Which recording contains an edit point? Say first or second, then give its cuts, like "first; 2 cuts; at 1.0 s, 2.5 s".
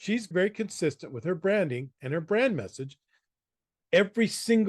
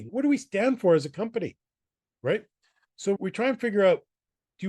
first; 1 cut; at 3.7 s